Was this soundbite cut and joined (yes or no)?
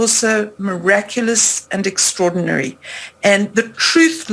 no